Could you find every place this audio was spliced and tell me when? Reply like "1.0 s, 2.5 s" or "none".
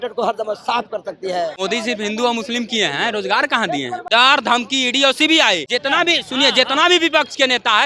1.6 s, 4.0 s, 5.6 s